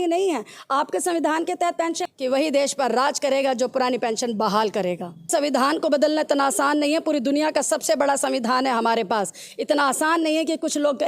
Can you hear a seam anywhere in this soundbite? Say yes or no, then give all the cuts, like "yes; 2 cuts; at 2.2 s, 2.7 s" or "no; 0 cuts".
yes; 2 cuts; at 2.0 s, 5.3 s